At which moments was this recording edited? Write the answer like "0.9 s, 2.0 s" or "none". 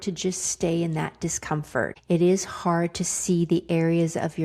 2.0 s